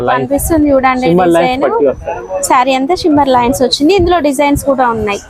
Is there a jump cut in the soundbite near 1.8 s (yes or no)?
no